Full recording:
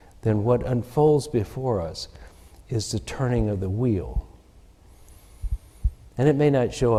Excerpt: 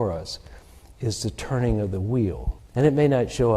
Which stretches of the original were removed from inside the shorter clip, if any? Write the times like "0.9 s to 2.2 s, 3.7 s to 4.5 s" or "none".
4.2 s to 6.0 s